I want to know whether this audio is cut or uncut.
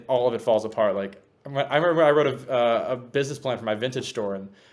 uncut